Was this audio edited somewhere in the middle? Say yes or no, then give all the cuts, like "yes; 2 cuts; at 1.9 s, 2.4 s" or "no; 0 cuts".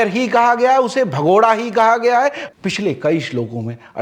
yes; 1 cut; at 2.5 s